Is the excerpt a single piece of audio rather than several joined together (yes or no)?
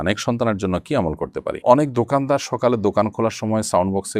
no